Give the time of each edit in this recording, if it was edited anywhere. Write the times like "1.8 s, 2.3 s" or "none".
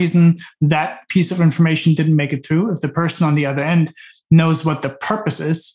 none